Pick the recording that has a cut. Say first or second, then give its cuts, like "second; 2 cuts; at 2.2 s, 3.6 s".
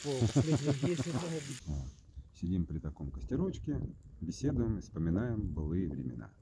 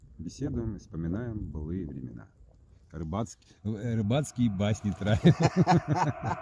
first; 1 cut; at 1.6 s